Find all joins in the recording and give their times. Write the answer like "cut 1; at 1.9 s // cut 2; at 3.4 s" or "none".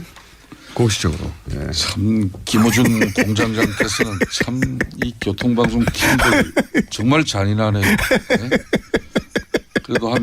cut 1; at 7.2 s